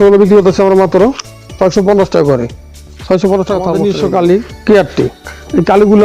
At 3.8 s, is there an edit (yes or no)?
yes